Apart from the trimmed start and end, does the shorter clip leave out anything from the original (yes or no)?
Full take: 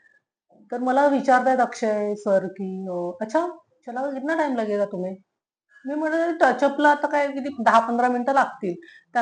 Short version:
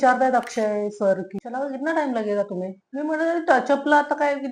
yes